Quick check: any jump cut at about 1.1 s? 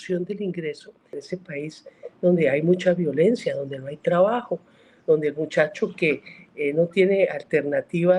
yes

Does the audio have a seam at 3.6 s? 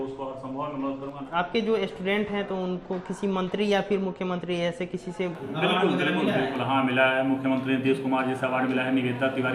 no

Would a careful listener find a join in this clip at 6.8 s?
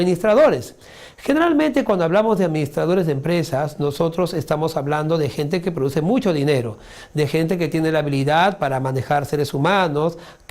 no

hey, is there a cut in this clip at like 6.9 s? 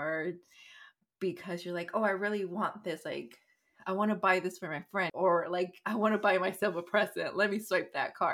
no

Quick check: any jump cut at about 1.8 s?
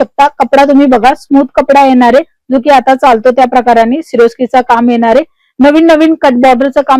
no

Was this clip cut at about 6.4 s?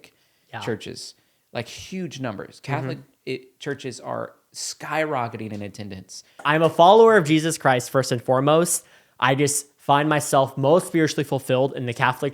yes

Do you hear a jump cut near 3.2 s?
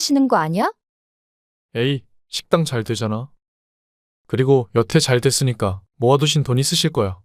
no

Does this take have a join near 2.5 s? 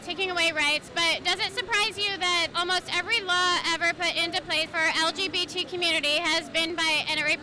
yes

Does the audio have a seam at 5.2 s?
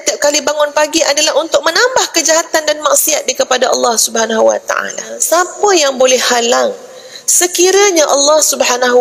yes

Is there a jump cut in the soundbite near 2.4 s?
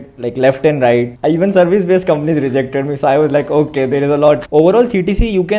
no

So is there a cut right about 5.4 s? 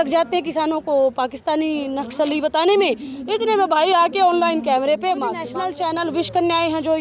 yes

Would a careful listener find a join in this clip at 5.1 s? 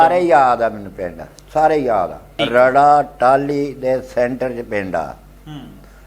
no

